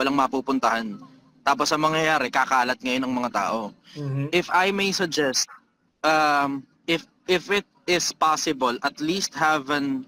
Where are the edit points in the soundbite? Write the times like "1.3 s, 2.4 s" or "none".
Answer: none